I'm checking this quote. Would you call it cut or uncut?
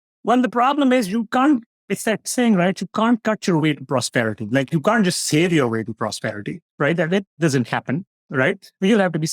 uncut